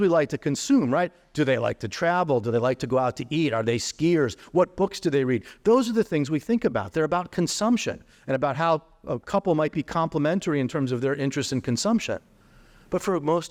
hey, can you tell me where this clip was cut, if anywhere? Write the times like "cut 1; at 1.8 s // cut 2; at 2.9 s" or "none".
none